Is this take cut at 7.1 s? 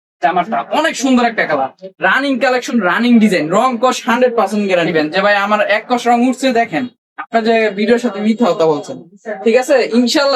no; 1 cut; at 4.9 s

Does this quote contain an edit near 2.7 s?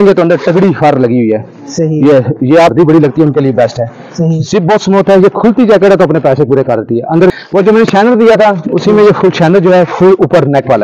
yes; 2 cuts; at 2.7 s, 7.3 s

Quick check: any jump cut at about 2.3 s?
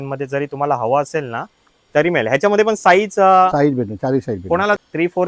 no; 0 cuts

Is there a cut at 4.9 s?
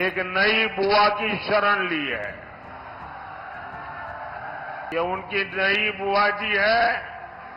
yes; 1 cut; at 4.9 s

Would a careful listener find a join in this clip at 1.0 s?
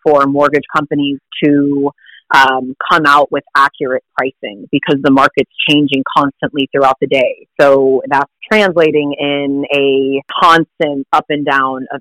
no; 4 cuts; at 7.4 s, 8.4 s, 10.3 s, 11.0 s

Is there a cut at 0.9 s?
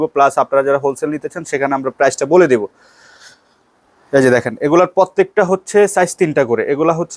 no; 0 cuts

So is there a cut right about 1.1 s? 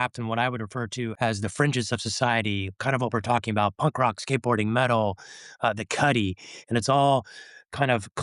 yes; 1 cut; at 1.1 s

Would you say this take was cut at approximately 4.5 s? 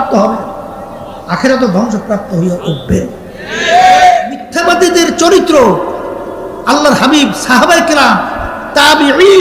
yes; 1 cut; at 4.5 s

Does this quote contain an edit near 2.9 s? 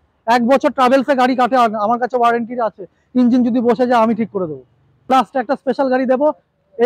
no; 1 cut; at 5.0 s

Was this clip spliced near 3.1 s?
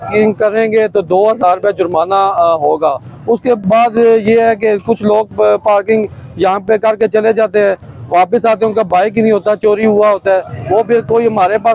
no; 0 cuts

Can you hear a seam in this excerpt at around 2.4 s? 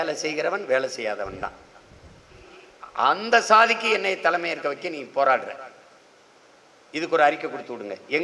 yes; 1 cut; at 2.4 s

